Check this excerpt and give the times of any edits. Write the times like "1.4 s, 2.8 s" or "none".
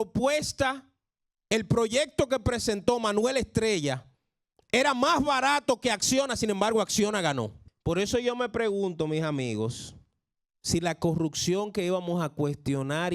7.6 s